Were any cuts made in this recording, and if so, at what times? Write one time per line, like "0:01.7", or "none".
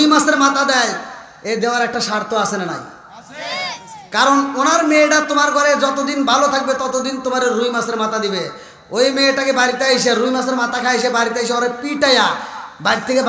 none